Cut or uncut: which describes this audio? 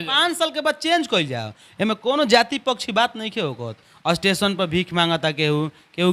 cut